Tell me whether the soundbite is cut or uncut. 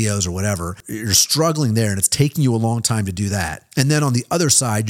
cut